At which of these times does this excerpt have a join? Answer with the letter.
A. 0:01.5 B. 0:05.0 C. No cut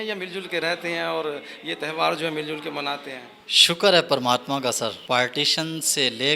B